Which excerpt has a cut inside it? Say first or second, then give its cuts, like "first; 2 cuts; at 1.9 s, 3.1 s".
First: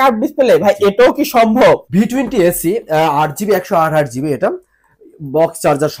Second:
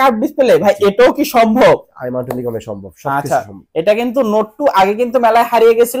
first; 1 cut; at 1.9 s